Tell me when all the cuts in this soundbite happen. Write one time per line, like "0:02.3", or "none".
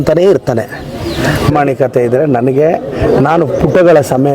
0:01.5